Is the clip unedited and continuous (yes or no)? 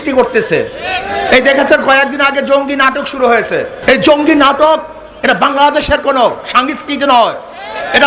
no